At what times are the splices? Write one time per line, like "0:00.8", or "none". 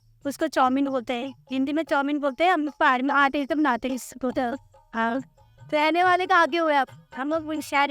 none